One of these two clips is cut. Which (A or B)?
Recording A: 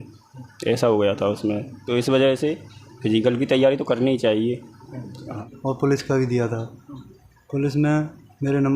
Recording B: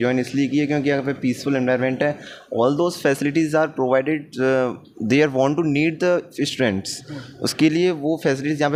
A